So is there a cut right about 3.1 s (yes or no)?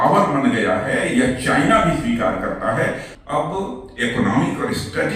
yes